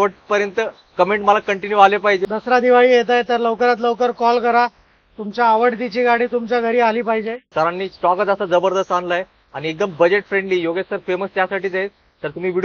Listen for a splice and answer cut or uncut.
cut